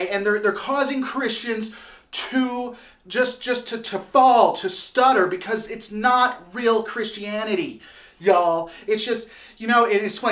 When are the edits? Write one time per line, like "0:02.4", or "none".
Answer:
0:07.0